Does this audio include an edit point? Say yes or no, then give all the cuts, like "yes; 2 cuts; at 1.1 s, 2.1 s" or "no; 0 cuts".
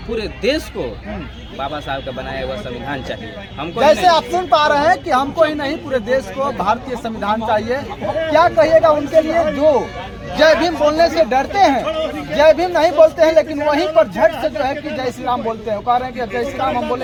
no; 0 cuts